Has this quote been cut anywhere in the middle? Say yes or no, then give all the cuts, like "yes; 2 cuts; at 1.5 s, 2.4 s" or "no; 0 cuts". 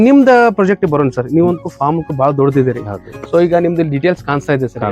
no; 0 cuts